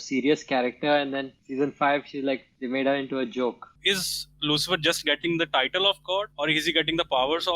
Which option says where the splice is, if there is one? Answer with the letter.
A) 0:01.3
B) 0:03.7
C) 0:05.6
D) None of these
B